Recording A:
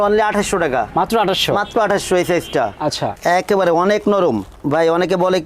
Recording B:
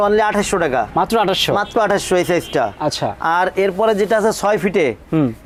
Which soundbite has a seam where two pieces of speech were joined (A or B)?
A